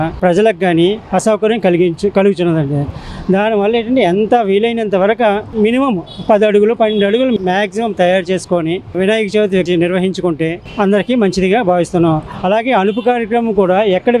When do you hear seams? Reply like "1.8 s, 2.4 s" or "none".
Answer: none